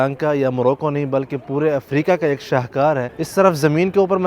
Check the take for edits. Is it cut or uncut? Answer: cut